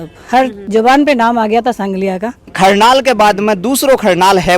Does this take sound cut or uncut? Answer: cut